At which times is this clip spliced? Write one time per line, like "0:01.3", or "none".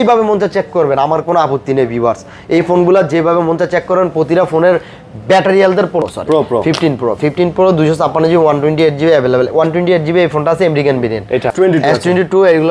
0:06.0
0:11.5